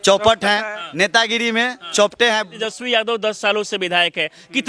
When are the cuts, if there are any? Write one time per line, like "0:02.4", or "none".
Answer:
0:02.5

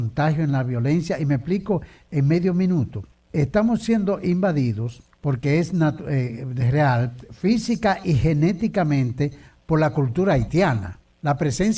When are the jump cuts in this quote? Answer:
0:08.6

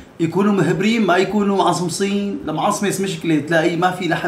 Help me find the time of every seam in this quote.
none

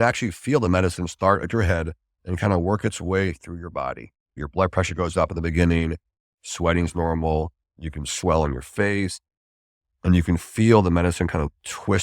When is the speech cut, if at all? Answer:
0:04.4
0:07.8

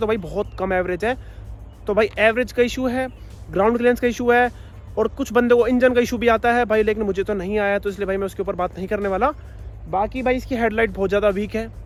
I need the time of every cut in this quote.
none

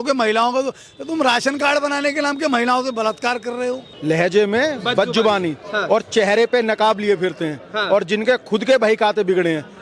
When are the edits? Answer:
0:03.9

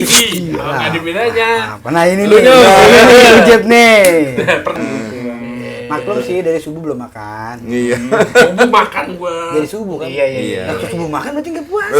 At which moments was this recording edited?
0:04.8

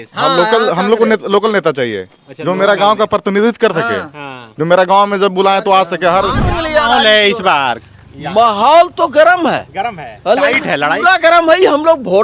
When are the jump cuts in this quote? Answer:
0:06.5

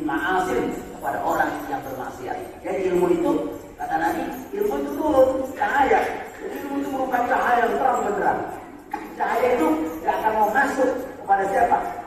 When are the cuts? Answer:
none

